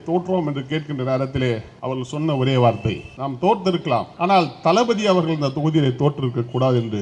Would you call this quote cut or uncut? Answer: cut